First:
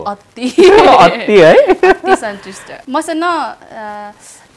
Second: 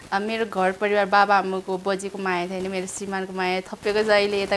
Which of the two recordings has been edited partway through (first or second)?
first